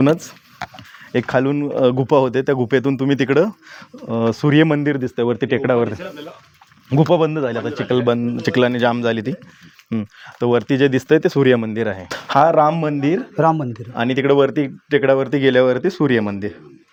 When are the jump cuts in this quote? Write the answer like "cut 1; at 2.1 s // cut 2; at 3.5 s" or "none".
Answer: none